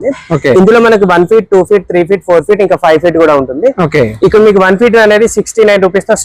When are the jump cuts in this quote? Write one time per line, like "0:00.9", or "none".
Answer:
none